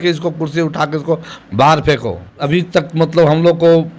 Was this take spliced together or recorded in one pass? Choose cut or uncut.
cut